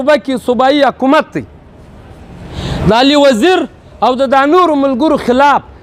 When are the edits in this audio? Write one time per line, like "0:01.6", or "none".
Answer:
none